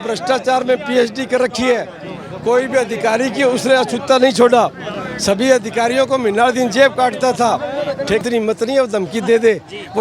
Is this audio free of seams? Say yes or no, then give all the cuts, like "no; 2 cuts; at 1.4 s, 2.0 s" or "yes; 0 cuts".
no; 1 cut; at 8.2 s